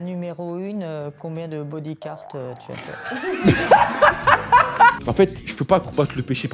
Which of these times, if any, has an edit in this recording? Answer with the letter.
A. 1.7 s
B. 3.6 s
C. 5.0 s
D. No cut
C